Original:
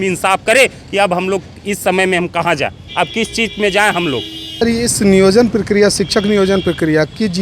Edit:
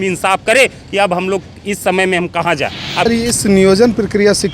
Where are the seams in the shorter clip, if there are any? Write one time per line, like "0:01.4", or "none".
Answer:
0:03.0